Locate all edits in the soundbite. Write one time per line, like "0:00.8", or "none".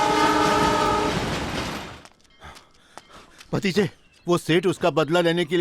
0:01.8